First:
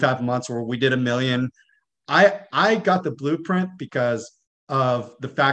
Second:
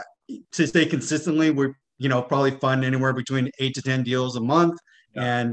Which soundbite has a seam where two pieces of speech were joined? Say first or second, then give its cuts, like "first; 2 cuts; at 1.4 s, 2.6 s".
first; 1 cut; at 1.7 s